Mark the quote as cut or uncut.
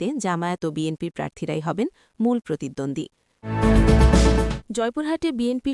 cut